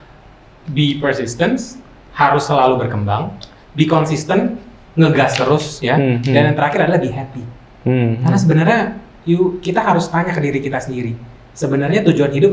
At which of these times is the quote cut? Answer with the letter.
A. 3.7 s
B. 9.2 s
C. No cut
C